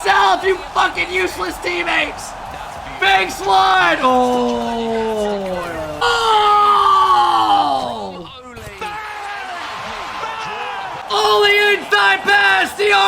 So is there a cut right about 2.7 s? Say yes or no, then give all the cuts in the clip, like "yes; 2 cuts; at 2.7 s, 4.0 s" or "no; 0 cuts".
no; 2 cuts; at 6.0 s, 11.0 s